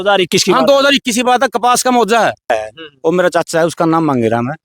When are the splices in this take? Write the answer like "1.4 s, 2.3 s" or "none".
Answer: 2.5 s